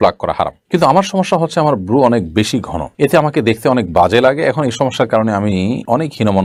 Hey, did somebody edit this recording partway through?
no; 0 cuts

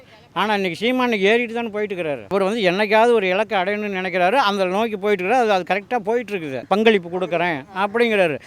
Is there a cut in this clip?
yes; 2 cuts; at 2.3 s, 6.6 s

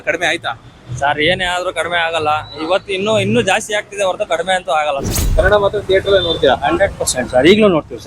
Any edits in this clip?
yes; 1 cut; at 5.1 s

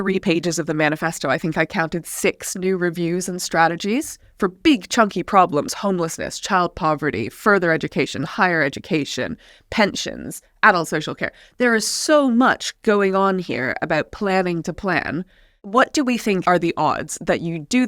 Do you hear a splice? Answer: yes; 2 cuts; at 15.6 s, 16.4 s

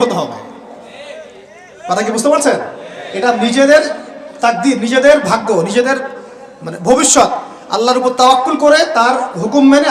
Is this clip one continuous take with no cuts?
yes; 0 cuts

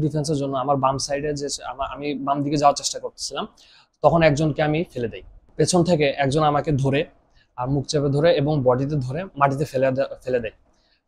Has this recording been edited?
yes; 1 cut; at 5.5 s

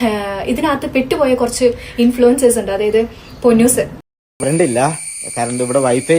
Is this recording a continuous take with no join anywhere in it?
no; 1 cut; at 4.0 s

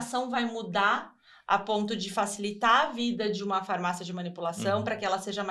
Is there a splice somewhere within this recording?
no; 0 cuts

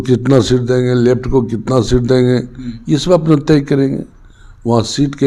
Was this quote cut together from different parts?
no; 0 cuts

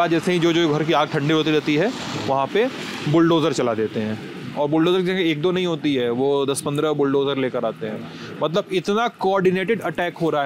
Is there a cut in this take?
no; 0 cuts

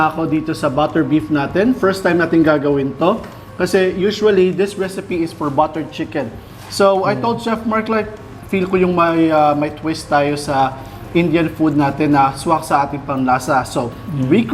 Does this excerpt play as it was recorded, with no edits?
yes; 0 cuts

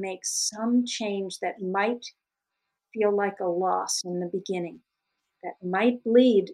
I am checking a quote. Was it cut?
no; 0 cuts

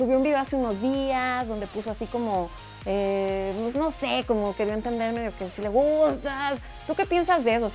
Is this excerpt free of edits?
yes; 0 cuts

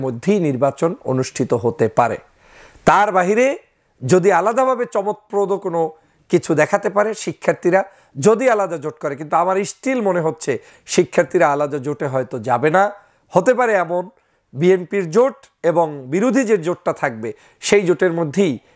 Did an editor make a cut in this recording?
no; 0 cuts

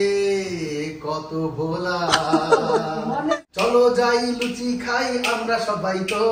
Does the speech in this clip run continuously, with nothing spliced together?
no; 1 cut; at 3.4 s

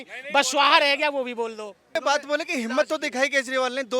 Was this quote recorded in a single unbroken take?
no; 1 cut; at 1.9 s

